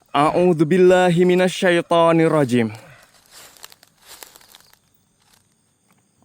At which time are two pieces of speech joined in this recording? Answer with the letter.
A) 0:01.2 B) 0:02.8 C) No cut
B